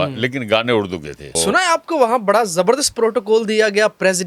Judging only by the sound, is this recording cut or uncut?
cut